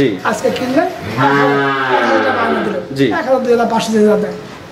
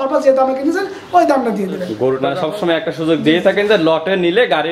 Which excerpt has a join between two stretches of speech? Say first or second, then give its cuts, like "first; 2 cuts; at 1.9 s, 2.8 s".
second; 1 cut; at 2.2 s